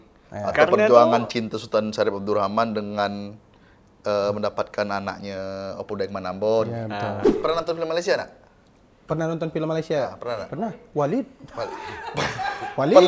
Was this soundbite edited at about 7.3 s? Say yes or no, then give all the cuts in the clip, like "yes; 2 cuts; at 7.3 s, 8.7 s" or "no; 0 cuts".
yes; 1 cut; at 7.3 s